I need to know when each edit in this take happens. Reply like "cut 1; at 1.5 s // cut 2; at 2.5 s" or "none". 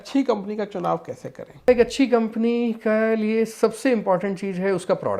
cut 1; at 1.7 s